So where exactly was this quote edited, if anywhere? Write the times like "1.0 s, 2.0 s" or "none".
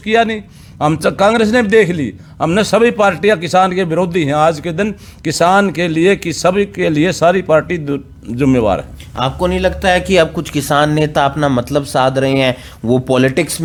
none